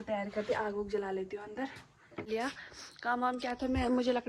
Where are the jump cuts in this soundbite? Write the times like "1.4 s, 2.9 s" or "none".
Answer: 2.3 s